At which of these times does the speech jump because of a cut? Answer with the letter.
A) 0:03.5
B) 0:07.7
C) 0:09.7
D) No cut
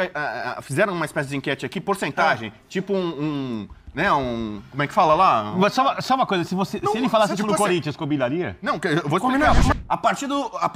C